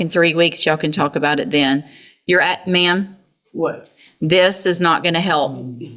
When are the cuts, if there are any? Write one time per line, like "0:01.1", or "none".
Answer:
none